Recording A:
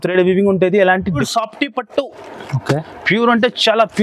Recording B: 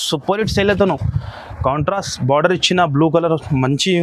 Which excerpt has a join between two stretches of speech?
A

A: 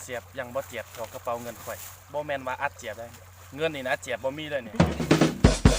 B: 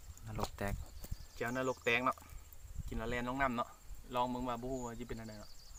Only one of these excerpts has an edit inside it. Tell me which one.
A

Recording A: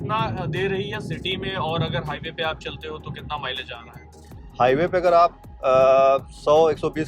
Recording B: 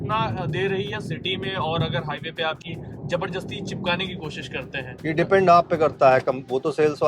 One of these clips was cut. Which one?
B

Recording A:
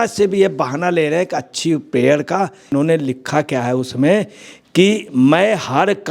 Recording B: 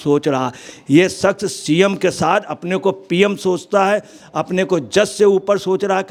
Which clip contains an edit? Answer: A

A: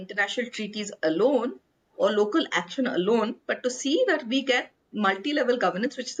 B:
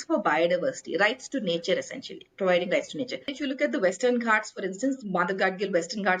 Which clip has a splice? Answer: B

